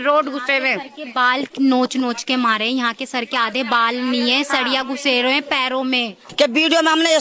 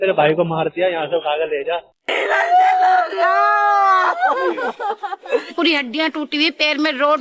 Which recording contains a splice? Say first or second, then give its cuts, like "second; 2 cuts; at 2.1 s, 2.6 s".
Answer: second; 1 cut; at 1.9 s